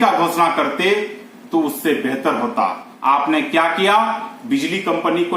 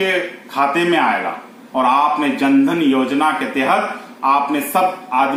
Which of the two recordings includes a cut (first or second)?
first